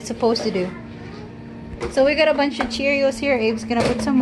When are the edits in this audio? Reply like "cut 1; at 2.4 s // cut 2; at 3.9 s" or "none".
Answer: cut 1; at 1.8 s